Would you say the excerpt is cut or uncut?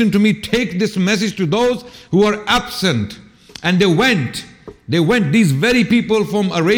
uncut